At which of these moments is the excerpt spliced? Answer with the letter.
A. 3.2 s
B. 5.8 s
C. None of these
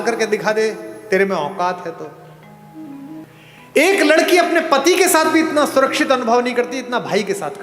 A